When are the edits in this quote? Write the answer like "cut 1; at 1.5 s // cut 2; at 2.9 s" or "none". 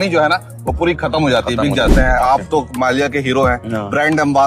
cut 1; at 2.0 s